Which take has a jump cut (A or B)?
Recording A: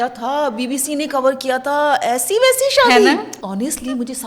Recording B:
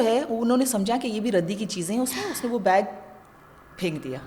A